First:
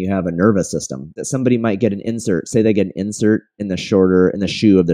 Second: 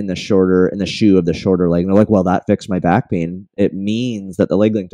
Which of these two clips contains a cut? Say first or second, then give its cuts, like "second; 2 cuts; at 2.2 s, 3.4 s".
first; 1 cut; at 1.2 s